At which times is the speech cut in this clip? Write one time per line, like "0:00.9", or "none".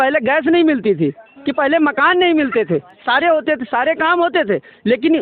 none